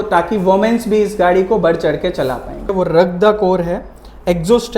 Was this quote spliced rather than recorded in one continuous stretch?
yes; 1 cut; at 2.7 s

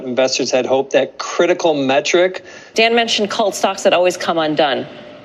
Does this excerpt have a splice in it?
yes; 1 cut; at 2.6 s

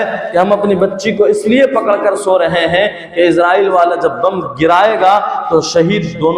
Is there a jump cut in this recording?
no; 0 cuts

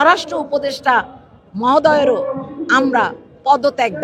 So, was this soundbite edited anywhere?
no; 0 cuts

